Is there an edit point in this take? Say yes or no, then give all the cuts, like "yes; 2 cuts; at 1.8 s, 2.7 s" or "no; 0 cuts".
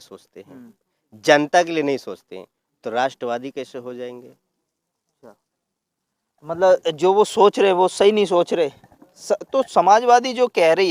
no; 0 cuts